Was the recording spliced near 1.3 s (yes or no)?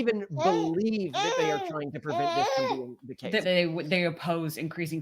no